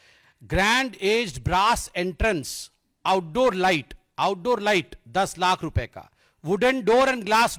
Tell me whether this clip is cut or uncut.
uncut